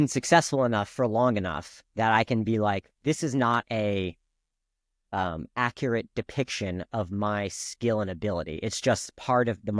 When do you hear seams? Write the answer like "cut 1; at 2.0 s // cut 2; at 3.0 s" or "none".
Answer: none

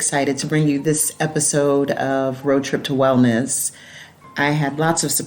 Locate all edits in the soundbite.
cut 1; at 4.2 s

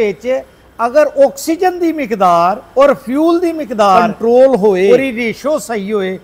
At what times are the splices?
cut 1; at 2.6 s // cut 2; at 4.1 s // cut 3; at 4.9 s

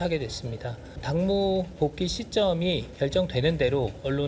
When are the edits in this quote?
cut 1; at 1.0 s

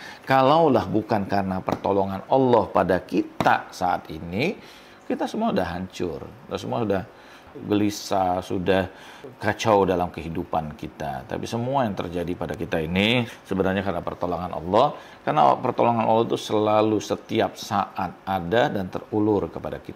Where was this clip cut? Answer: cut 1; at 7.4 s // cut 2; at 13.3 s

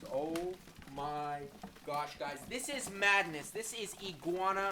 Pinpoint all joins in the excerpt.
none

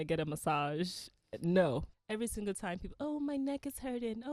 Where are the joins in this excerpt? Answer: cut 1; at 1.9 s

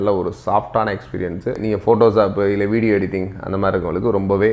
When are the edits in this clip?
cut 1; at 1.6 s

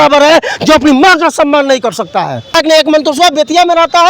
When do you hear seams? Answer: cut 1; at 2.5 s

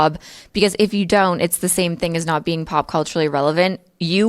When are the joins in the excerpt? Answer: none

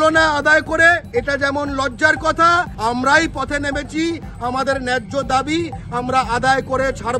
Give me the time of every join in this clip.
cut 1; at 1.1 s // cut 2; at 2.7 s

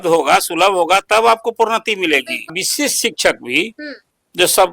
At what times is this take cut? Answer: cut 1; at 2.5 s

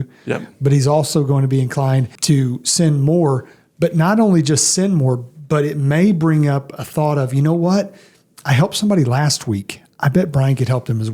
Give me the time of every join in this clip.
cut 1; at 2.1 s

